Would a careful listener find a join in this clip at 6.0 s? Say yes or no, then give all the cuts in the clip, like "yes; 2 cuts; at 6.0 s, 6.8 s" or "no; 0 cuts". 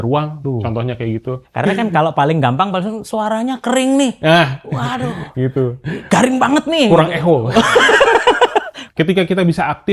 no; 2 cuts; at 1.5 s, 8.8 s